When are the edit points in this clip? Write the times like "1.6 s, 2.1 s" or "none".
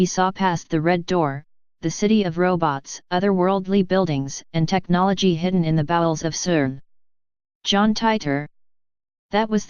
7.7 s